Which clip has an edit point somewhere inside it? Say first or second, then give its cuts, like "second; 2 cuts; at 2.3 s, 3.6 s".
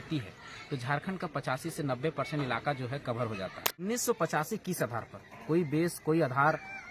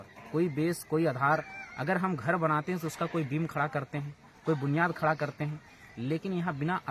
first; 1 cut; at 3.9 s